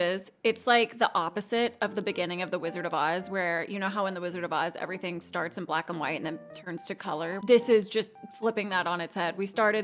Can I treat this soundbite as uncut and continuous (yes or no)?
yes